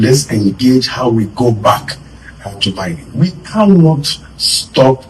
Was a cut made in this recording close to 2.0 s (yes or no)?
no